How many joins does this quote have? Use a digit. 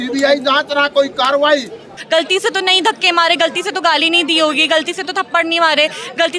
1